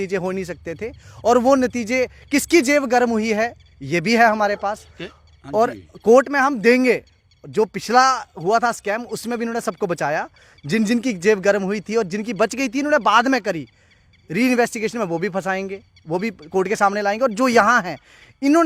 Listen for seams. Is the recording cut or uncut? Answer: uncut